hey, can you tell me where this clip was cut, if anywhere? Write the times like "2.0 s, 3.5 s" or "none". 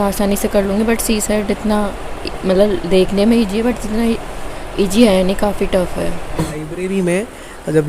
6.3 s